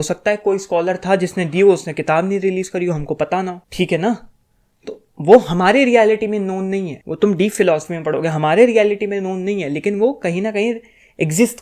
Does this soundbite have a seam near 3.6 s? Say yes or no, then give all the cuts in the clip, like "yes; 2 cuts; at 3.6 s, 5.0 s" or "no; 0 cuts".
yes; 2 cuts; at 3.6 s, 7.0 s